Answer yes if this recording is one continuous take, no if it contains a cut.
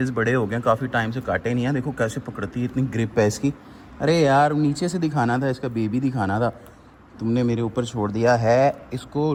yes